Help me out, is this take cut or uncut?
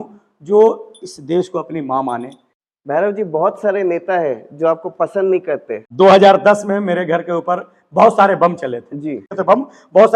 cut